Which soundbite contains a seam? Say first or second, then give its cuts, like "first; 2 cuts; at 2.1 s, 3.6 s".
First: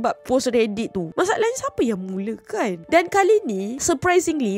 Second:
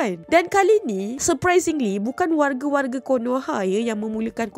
first; 1 cut; at 1.0 s